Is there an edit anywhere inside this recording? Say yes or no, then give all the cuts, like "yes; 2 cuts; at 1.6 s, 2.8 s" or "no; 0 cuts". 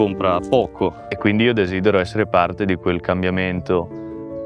yes; 1 cut; at 1.1 s